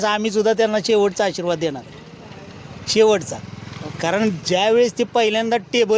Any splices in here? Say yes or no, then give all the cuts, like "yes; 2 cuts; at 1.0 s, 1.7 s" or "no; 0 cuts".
no; 0 cuts